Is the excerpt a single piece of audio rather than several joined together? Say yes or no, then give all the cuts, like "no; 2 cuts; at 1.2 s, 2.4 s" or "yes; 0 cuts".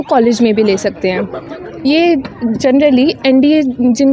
yes; 0 cuts